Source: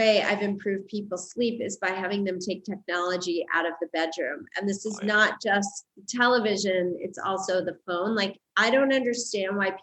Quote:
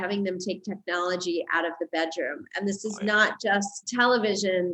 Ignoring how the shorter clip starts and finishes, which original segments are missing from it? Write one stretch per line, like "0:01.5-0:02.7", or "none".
0:05.8-0:06.0